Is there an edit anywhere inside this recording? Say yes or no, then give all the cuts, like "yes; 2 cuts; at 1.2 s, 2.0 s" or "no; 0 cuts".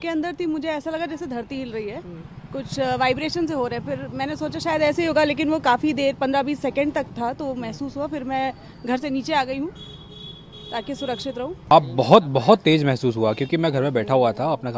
no; 0 cuts